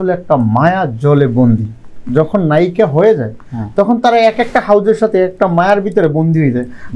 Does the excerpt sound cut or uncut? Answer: uncut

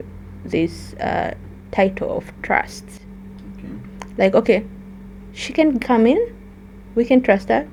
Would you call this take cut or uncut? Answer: uncut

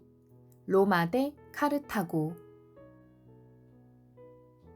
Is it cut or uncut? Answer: cut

